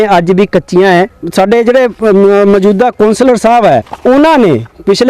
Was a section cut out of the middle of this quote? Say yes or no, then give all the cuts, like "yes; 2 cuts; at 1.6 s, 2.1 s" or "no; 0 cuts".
yes; 2 cuts; at 1.2 s, 3.9 s